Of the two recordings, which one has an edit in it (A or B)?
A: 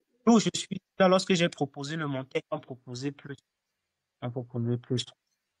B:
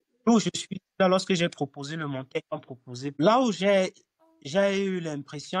B